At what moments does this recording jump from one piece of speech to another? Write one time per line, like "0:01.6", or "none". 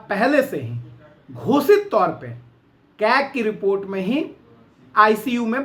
none